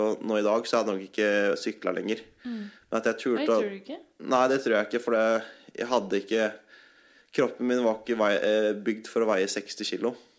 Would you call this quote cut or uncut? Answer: uncut